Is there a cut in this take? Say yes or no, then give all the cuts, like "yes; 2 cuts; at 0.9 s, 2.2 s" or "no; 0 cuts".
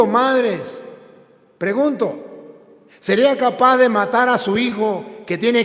no; 0 cuts